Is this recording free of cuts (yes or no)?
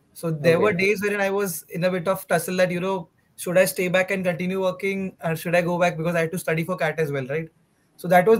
yes